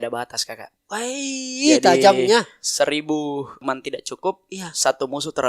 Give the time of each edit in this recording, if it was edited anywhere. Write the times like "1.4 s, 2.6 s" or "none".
3.6 s